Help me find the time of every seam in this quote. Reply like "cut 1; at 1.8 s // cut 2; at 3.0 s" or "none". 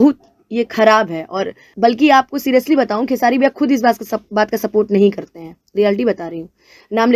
cut 1; at 1.7 s